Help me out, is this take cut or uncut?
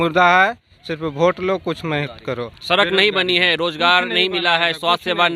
uncut